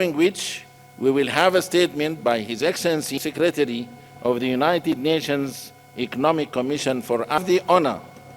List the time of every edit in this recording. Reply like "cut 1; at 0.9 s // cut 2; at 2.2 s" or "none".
cut 1; at 3.2 s // cut 2; at 7.4 s